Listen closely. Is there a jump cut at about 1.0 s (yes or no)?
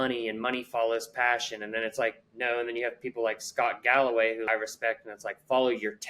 no